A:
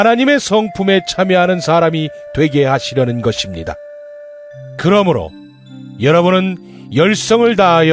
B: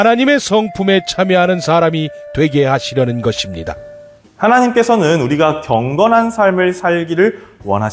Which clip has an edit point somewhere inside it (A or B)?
A